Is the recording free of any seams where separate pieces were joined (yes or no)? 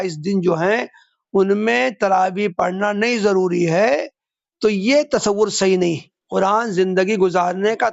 no